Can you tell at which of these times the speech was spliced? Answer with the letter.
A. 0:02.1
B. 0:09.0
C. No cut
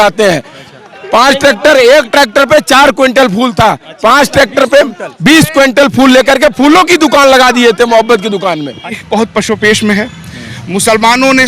B